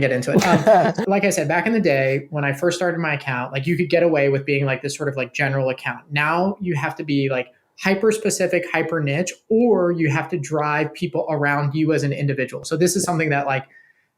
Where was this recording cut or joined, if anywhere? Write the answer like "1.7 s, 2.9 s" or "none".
1.0 s, 12.6 s